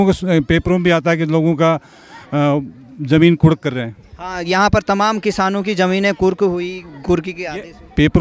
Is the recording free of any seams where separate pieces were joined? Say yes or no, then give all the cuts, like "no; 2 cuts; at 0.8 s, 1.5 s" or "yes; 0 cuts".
yes; 0 cuts